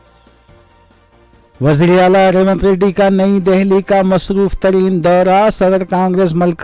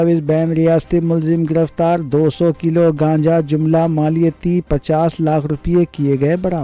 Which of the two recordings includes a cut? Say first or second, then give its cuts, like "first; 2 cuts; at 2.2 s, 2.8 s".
first; 1 cut; at 1.0 s